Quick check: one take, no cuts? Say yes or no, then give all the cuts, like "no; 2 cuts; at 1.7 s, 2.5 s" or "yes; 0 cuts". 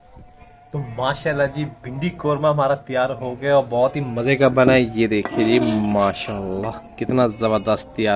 yes; 0 cuts